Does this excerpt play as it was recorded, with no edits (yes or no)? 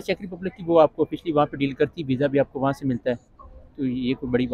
yes